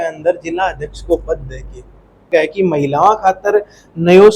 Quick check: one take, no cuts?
no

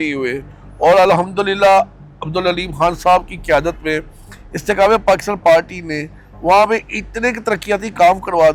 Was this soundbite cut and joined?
no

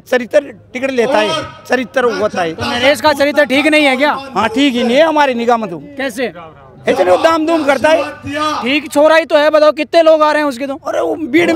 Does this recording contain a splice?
no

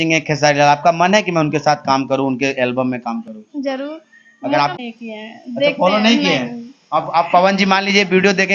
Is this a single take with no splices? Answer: no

